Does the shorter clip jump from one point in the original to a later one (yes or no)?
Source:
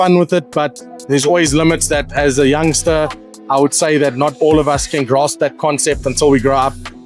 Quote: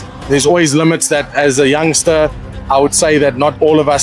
no